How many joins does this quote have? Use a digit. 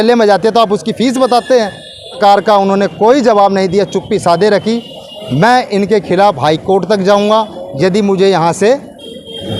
1